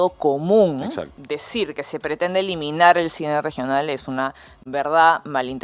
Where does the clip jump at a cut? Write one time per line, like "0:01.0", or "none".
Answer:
0:01.1